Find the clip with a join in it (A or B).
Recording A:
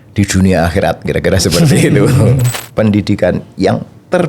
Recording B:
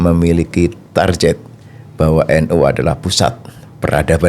A